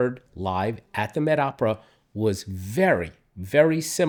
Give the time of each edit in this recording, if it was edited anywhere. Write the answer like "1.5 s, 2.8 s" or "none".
none